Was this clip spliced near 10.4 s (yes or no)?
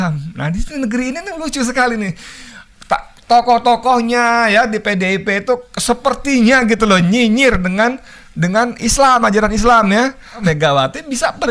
yes